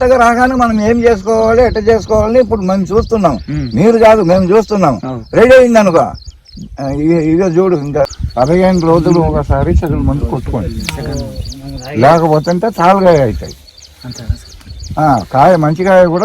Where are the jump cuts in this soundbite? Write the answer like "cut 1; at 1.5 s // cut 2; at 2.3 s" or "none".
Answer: cut 1; at 8.1 s